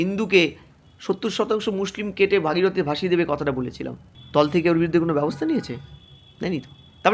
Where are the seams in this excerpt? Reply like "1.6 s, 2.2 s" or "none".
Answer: 4.1 s